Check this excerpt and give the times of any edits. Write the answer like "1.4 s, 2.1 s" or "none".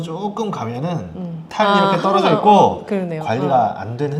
none